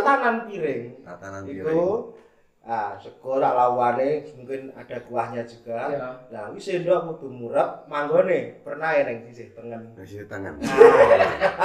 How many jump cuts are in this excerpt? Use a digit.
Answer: 0